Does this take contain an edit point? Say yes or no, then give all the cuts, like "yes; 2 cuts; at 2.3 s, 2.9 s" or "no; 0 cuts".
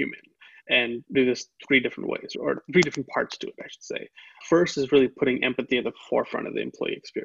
no; 0 cuts